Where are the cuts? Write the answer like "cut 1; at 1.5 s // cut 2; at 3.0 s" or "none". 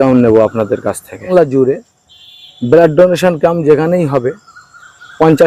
cut 1; at 1.3 s